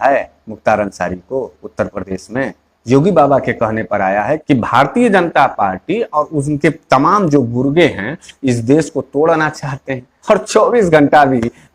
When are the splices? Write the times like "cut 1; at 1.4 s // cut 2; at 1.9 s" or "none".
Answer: cut 1; at 4.4 s // cut 2; at 10.1 s